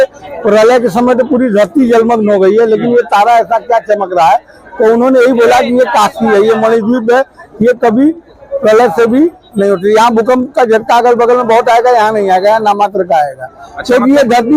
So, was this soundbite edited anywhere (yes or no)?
no